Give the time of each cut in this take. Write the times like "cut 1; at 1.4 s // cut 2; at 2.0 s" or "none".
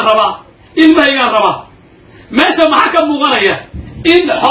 none